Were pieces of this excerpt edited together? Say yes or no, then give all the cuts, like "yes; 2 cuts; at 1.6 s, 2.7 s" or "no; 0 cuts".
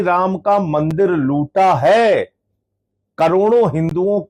no; 0 cuts